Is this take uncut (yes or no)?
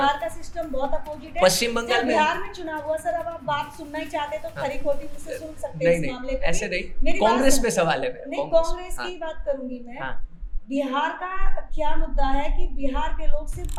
yes